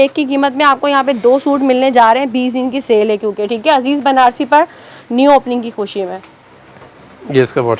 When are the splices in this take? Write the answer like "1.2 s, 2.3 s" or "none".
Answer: none

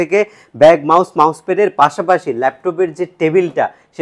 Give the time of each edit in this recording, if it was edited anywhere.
none

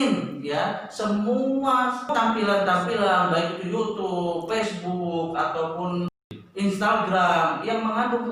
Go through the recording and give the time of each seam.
2.1 s

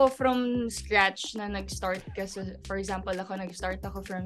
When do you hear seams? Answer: none

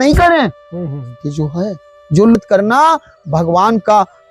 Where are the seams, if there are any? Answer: 2.4 s

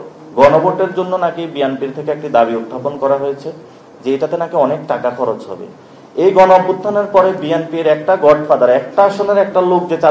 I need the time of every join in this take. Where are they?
none

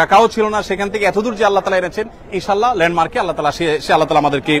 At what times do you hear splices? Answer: none

